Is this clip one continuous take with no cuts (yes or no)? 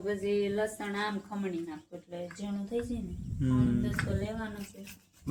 yes